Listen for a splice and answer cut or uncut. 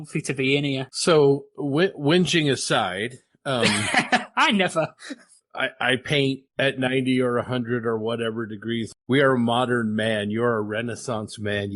cut